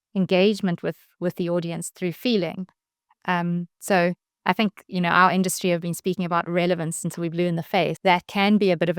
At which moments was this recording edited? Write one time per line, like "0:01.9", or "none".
0:08.0